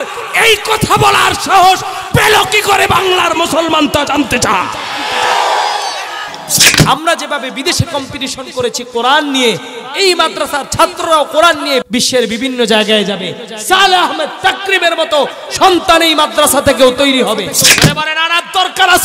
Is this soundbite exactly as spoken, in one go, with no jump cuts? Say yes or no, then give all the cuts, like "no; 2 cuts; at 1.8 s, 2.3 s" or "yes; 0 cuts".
no; 3 cuts; at 6.7 s, 11.8 s, 17.8 s